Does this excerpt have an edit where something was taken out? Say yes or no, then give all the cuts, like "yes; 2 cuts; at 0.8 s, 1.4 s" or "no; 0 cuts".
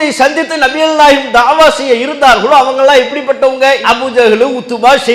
no; 0 cuts